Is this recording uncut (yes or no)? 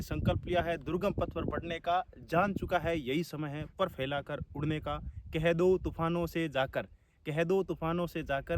yes